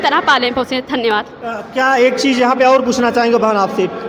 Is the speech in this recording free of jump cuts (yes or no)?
yes